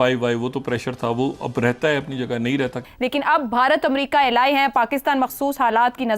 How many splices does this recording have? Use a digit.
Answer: 1